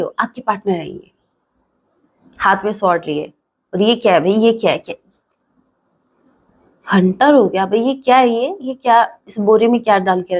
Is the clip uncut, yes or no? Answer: yes